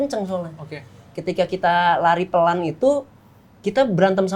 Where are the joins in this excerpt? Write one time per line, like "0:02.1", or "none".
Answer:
none

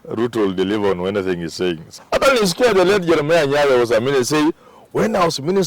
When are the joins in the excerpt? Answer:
0:01.9

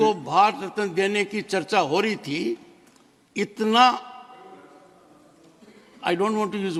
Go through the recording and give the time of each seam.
none

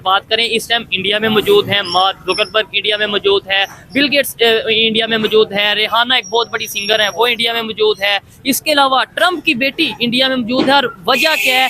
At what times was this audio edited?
none

